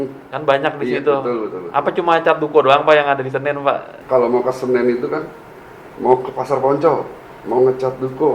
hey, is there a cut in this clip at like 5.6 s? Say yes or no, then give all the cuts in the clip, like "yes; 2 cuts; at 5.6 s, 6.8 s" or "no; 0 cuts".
no; 1 cut; at 3.9 s